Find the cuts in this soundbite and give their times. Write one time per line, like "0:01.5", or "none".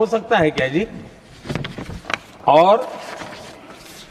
none